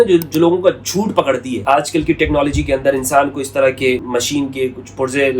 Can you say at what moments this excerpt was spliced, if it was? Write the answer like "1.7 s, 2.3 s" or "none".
1.6 s, 4.0 s